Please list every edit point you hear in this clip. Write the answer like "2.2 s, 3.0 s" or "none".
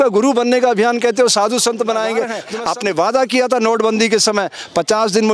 2.5 s